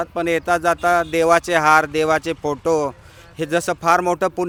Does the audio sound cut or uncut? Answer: uncut